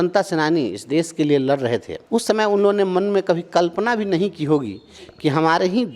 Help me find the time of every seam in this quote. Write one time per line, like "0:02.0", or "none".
0:01.9